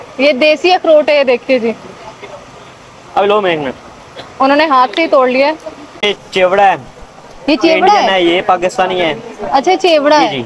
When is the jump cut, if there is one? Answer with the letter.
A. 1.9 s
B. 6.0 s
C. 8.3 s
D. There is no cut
B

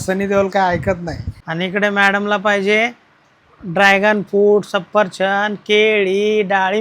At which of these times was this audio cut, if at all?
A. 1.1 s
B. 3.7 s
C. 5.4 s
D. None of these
A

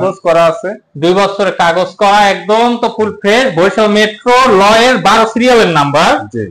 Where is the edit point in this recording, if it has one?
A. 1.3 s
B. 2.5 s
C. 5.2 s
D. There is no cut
D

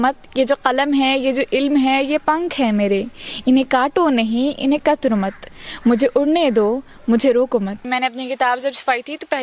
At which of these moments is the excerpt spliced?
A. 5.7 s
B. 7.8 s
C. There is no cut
B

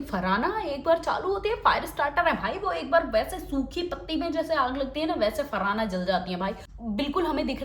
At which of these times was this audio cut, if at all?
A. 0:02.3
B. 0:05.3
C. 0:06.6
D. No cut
C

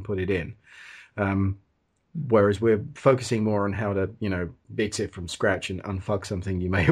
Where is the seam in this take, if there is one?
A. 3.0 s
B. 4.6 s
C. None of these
B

